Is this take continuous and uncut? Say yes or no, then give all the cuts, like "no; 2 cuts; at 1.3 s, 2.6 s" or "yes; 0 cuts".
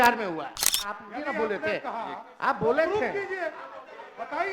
no; 1 cut; at 1.0 s